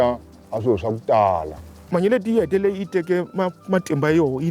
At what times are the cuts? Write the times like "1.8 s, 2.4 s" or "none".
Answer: 1.7 s